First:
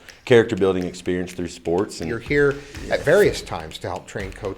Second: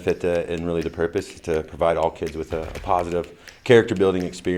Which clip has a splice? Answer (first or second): first